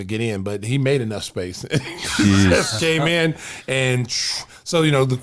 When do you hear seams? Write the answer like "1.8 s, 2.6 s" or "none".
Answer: none